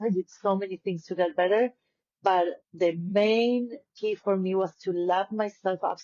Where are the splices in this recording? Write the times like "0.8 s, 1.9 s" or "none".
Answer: none